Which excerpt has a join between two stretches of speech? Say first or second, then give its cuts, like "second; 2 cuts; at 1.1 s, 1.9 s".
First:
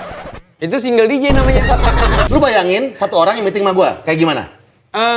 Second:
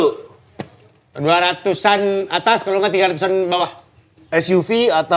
first; 1 cut; at 2.2 s